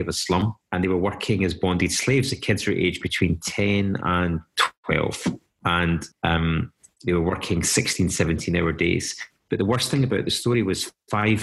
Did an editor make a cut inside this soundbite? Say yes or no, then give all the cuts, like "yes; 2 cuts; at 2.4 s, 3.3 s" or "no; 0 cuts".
yes; 1 cut; at 9.2 s